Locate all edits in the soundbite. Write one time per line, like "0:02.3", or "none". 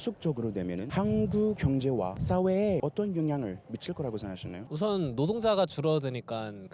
0:00.9
0:01.8
0:02.8
0:04.6